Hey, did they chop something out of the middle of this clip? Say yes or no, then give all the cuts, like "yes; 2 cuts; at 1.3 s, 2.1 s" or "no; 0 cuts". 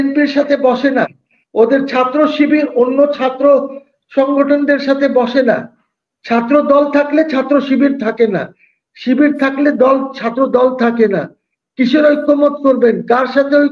no; 0 cuts